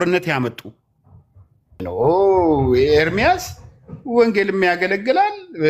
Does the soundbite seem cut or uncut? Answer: cut